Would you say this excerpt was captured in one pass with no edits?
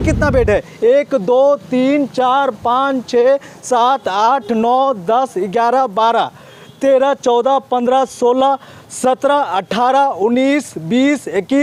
yes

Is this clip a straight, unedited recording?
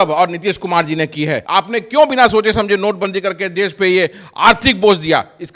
no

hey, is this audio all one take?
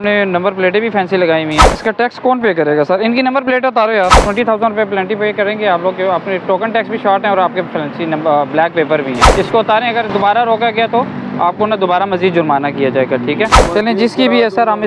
no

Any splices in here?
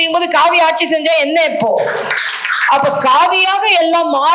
no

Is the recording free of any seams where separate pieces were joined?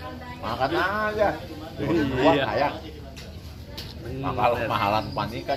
yes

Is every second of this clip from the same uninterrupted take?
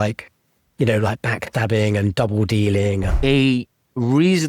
no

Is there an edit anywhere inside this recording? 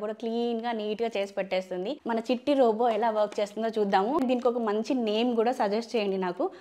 yes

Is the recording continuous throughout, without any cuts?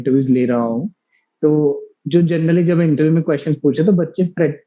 yes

